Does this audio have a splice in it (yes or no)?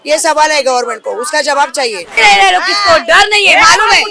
yes